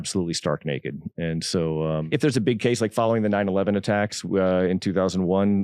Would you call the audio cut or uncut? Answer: cut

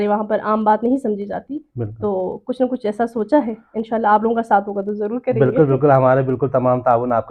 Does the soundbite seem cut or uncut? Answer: uncut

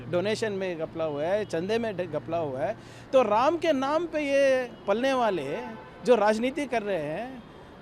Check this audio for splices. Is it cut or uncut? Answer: uncut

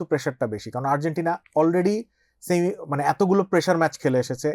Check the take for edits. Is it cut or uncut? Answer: uncut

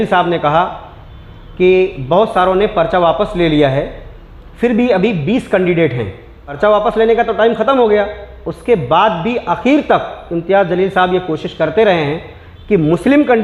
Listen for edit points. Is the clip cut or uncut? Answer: uncut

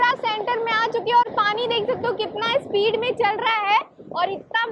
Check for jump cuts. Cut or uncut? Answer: uncut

